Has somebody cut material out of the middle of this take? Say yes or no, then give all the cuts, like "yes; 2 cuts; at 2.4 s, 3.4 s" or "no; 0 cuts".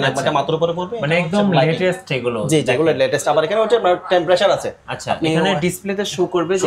no; 0 cuts